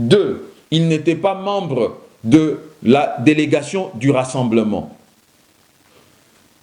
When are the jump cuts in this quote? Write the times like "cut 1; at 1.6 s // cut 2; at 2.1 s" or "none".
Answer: none